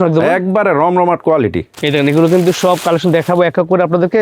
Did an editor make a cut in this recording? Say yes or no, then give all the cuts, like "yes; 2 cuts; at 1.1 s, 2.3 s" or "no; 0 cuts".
yes; 1 cut; at 1.7 s